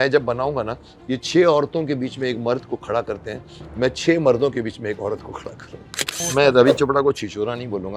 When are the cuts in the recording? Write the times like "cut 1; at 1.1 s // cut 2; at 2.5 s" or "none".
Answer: cut 1; at 6.2 s

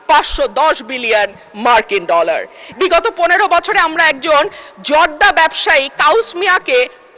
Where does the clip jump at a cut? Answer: cut 1; at 2.6 s

